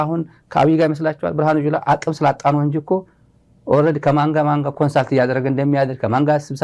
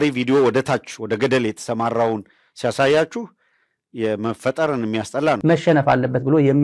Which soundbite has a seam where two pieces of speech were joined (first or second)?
second